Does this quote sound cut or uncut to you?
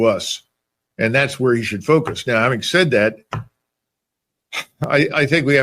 uncut